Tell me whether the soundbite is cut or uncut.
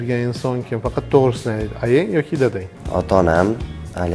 cut